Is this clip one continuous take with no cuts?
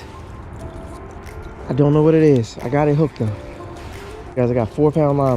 no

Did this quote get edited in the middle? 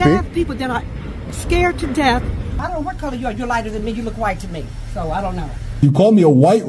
yes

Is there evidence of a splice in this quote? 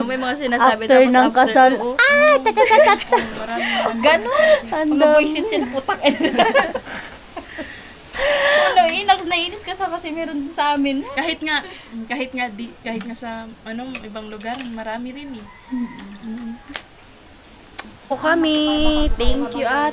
yes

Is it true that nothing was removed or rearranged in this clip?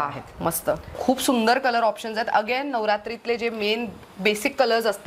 no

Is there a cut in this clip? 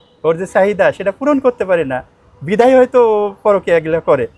no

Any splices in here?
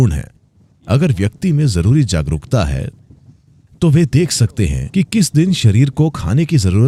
no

